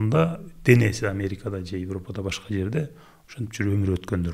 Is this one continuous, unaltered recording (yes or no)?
yes